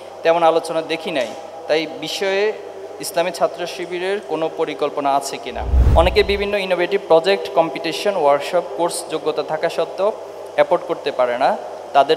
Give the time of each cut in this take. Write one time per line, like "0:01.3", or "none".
0:05.8